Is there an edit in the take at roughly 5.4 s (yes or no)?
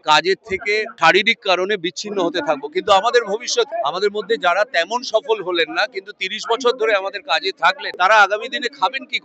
no